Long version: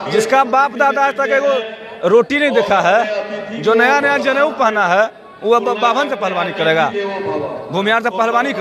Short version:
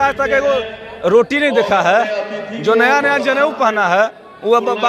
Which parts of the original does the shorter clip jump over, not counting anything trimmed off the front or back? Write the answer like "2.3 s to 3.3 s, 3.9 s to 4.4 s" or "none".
none